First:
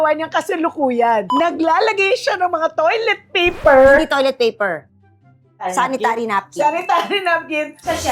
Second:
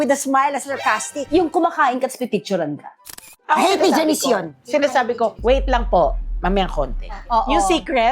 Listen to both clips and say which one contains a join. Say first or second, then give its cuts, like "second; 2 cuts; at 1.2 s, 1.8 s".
second; 2 cuts; at 1.2 s, 7.2 s